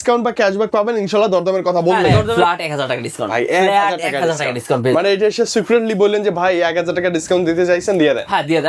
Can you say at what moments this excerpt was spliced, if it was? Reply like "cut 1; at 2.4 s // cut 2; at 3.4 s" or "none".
cut 1; at 2.3 s